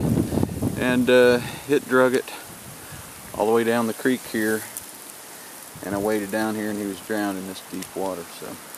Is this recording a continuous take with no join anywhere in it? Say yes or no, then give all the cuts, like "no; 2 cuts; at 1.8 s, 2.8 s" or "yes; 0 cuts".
yes; 0 cuts